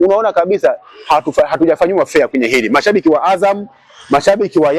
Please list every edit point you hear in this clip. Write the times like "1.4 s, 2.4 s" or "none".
none